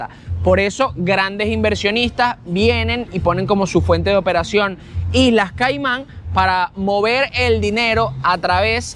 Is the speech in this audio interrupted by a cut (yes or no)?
no